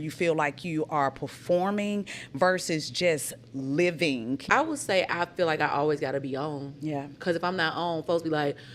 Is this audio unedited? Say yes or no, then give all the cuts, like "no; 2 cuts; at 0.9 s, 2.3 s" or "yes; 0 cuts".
no; 1 cut; at 4.4 s